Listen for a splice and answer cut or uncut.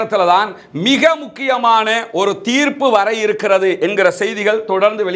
uncut